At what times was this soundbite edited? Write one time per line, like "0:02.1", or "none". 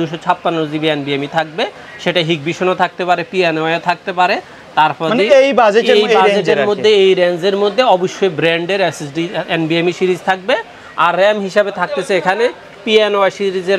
none